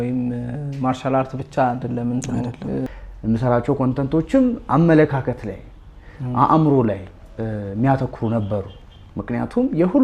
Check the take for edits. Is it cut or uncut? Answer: cut